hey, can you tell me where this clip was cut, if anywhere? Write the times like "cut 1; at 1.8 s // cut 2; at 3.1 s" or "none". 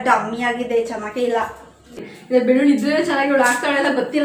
cut 1; at 1.9 s